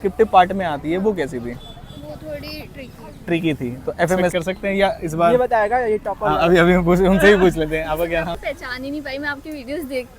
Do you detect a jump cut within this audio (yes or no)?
yes